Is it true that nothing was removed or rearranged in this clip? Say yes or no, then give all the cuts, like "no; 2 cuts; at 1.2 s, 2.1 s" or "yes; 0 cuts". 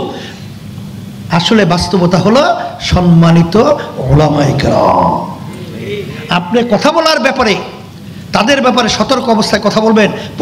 yes; 0 cuts